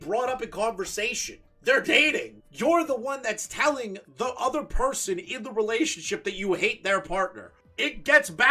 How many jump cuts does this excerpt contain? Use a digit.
0